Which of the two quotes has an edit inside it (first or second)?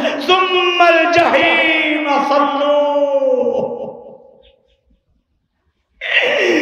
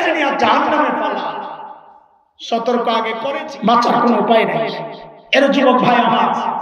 second